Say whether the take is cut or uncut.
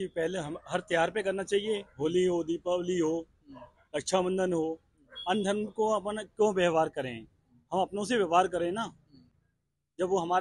uncut